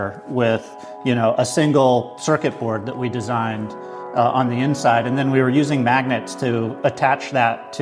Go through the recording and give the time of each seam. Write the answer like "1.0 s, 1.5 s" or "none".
none